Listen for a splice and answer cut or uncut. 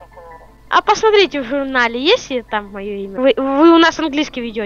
cut